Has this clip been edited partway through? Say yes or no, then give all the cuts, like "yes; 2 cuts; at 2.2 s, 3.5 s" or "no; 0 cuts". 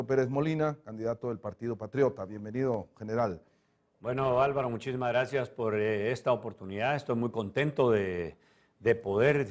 no; 0 cuts